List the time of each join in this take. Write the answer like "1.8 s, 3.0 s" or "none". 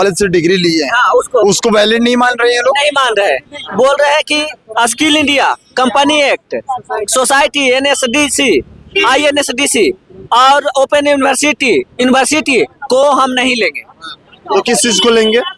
none

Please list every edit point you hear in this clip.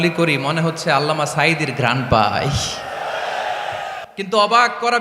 4.0 s

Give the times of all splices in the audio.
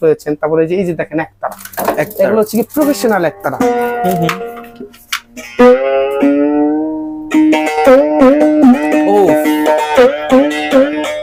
none

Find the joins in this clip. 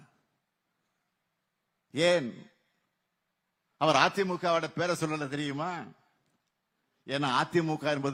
none

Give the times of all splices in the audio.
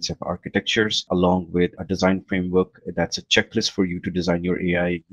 1.1 s, 1.8 s

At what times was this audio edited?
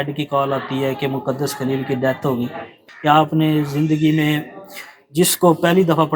2.8 s

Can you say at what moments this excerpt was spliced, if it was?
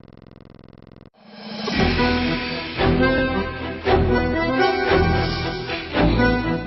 1.1 s

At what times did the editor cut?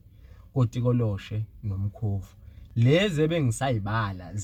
none

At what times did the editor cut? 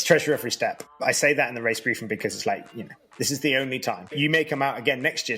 0.9 s, 4.1 s

